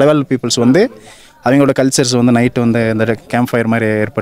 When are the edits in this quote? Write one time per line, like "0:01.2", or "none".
none